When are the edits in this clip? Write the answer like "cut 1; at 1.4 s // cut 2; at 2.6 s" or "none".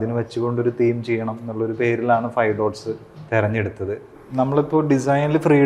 cut 1; at 4.1 s

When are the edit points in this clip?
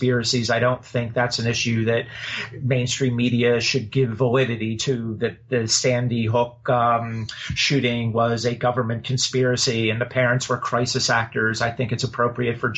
none

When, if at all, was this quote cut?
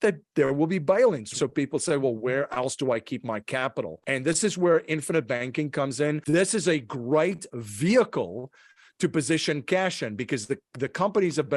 cut 1; at 1.3 s // cut 2; at 4.0 s // cut 3; at 6.2 s

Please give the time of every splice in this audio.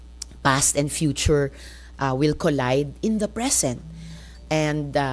none

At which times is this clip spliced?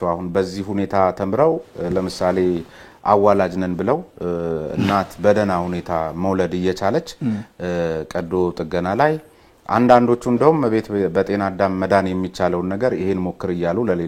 none

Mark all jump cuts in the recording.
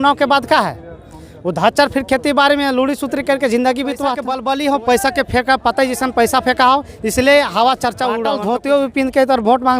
cut 1; at 4.3 s // cut 2; at 8.3 s

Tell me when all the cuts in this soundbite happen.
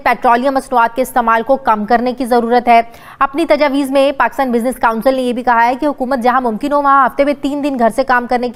none

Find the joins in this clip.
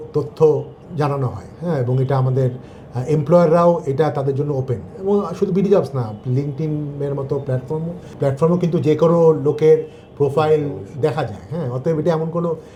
none

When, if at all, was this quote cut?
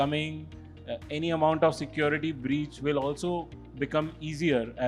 none

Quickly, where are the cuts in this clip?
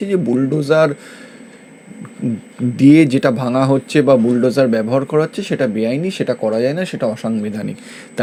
none

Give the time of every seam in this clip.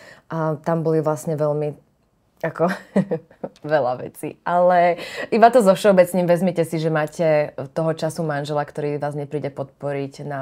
none

